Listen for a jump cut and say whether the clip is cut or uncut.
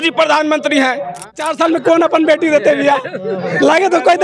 cut